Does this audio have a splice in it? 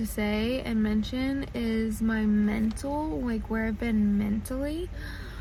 no; 0 cuts

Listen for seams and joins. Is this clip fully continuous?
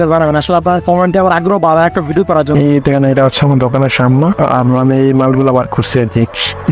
no; 1 cut; at 2.5 s

